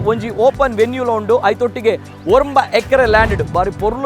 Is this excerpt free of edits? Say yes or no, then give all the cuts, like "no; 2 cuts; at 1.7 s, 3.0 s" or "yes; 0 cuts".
yes; 0 cuts